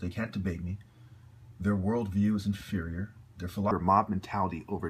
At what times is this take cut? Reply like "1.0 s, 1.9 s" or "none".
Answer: none